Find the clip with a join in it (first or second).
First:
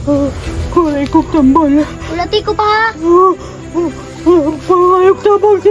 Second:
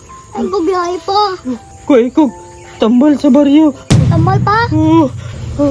second